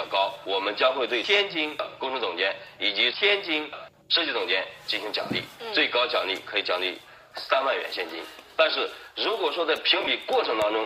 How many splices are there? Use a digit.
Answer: 1